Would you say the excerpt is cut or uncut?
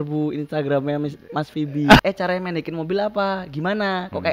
cut